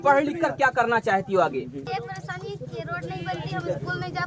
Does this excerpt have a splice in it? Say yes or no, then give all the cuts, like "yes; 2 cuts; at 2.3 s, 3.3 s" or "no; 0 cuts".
yes; 1 cut; at 1.9 s